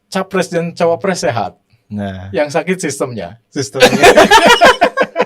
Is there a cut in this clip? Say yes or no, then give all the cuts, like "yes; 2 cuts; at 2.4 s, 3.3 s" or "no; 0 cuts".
no; 0 cuts